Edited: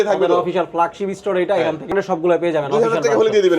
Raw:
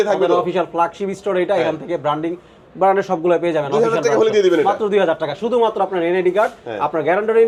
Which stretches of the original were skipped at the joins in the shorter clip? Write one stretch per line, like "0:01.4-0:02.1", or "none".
0:01.9-0:02.9